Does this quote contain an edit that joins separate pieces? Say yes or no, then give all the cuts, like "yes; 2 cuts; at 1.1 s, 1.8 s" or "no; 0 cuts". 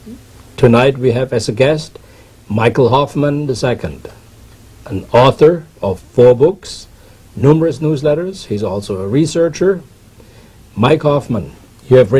yes; 1 cut; at 4.9 s